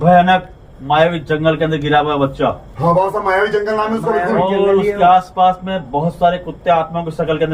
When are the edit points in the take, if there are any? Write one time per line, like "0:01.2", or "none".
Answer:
none